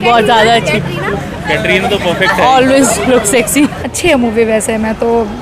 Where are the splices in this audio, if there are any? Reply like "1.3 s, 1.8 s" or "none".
3.8 s